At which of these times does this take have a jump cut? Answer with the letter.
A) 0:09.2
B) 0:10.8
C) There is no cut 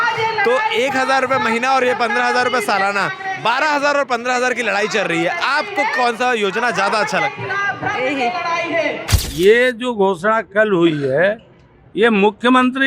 A